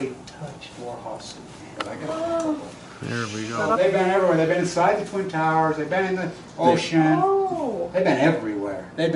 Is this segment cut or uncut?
uncut